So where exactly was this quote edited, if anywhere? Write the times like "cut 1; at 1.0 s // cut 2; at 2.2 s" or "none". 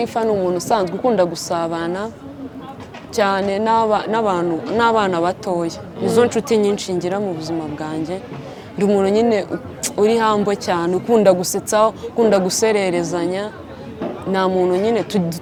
none